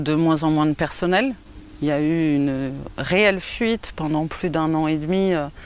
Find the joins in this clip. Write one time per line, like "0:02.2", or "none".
none